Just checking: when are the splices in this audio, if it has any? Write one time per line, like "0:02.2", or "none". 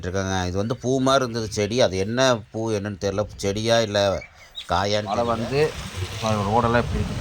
0:05.1